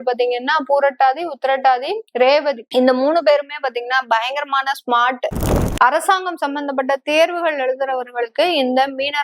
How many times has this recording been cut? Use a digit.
3